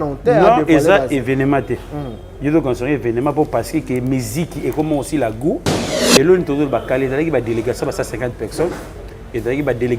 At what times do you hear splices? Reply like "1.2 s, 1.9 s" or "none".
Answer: 5.9 s